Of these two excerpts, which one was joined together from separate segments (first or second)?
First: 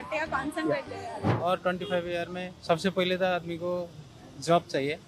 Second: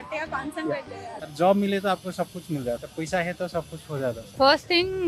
second